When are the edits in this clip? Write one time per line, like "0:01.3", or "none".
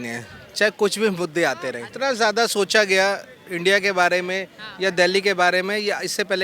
0:01.9